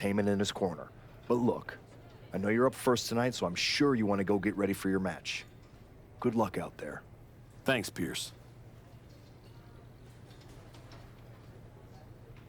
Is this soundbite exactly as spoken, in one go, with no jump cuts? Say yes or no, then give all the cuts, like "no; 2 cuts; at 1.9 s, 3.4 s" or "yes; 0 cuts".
no; 2 cuts; at 8.6 s, 10.5 s